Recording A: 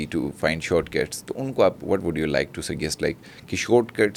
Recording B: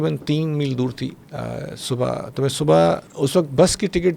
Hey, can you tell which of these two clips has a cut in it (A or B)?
B